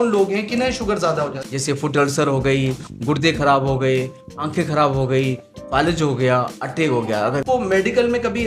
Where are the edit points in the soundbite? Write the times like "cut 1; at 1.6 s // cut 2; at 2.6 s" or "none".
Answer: cut 1; at 1.4 s // cut 2; at 7.4 s